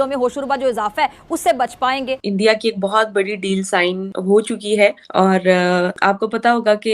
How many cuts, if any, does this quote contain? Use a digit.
4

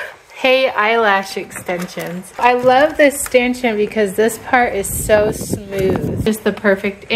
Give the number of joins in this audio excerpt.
2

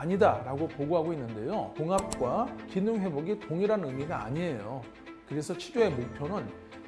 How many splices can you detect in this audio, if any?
1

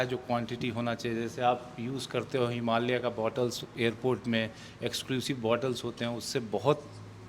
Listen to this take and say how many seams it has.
0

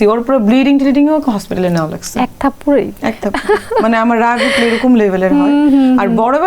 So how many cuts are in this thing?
0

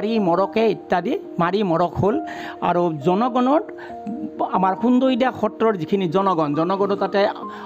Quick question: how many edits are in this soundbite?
0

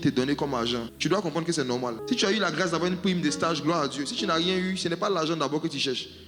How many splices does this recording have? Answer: 2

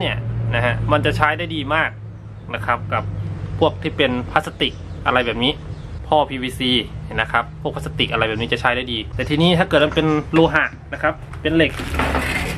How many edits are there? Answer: 2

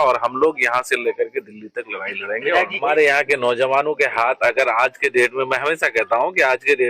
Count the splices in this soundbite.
1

